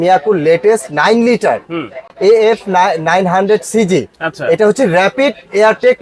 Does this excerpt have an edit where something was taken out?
no; 0 cuts

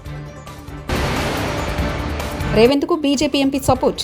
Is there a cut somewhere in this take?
yes; 2 cuts; at 0.9 s, 2.5 s

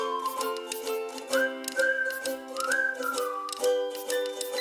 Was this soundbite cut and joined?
no; 0 cuts

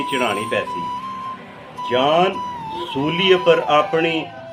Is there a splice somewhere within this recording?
no; 0 cuts

